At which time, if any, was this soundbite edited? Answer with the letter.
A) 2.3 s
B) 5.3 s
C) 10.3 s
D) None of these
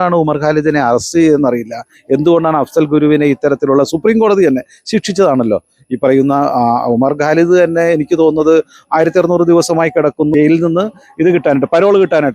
C